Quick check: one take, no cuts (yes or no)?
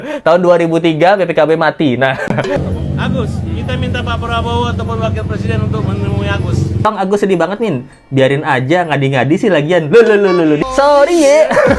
no